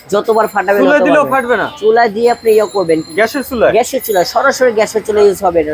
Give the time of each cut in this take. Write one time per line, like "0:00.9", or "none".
none